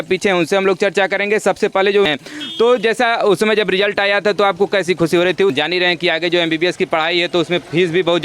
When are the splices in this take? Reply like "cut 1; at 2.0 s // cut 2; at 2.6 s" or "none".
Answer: cut 1; at 2.1 s // cut 2; at 5.6 s